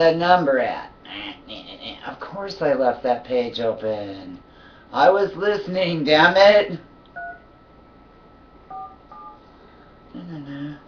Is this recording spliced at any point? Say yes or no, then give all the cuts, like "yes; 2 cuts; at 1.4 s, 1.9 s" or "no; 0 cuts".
yes; 1 cut; at 3.7 s